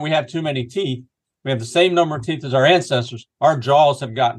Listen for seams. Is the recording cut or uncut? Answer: uncut